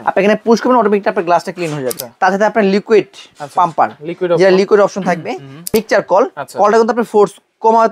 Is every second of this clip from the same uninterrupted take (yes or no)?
no